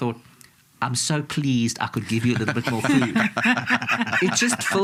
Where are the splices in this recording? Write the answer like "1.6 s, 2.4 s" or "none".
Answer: none